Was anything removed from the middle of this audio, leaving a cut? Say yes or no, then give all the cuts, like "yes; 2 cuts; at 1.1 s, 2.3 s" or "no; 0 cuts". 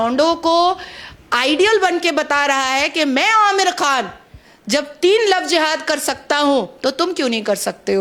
no; 0 cuts